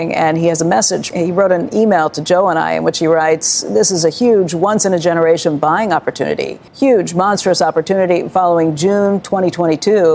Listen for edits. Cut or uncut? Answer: cut